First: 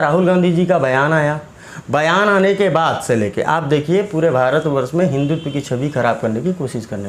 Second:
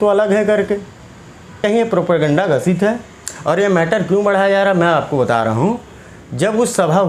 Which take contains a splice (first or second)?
second